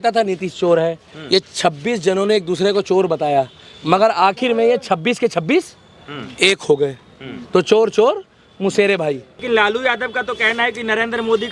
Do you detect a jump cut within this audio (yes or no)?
yes